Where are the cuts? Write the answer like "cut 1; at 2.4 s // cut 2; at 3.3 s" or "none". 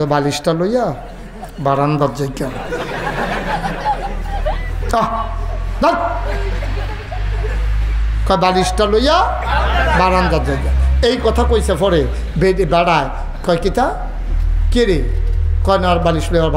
none